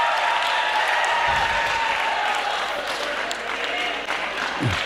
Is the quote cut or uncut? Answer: uncut